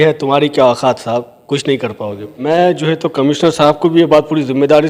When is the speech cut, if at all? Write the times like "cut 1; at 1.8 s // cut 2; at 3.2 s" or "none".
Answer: cut 1; at 2.4 s

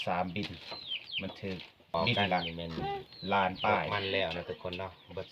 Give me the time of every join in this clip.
cut 1; at 3.9 s

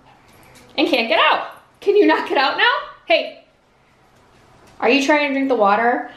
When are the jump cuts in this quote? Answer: none

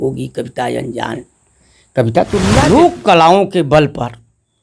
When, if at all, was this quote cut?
cut 1; at 2.6 s

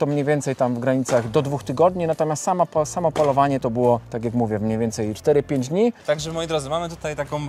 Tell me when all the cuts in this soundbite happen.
cut 1; at 4.1 s // cut 2; at 5.2 s // cut 3; at 6.0 s

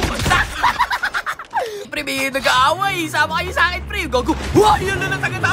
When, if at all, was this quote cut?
cut 1; at 1.9 s

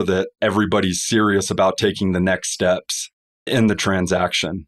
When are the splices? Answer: cut 1; at 3.5 s

